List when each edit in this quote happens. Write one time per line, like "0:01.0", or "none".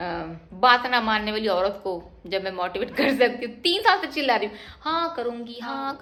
none